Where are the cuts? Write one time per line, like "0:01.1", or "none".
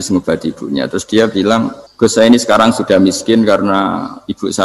0:01.8